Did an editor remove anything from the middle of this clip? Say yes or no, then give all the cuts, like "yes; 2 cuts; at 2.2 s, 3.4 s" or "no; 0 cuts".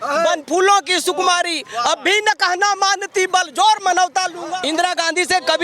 yes; 1 cut; at 4.4 s